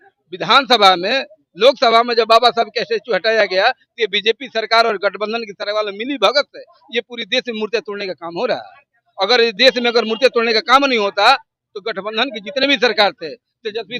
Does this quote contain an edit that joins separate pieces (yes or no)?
no